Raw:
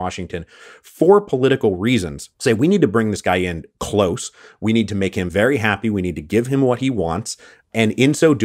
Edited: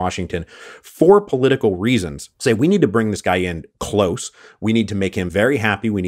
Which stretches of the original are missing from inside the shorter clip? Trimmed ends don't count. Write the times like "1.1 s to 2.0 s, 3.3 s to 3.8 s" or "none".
none